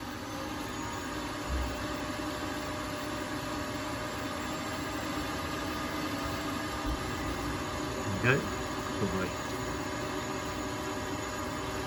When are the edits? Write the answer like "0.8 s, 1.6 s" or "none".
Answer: none